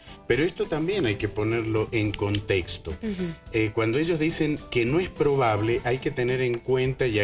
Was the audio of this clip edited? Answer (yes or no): yes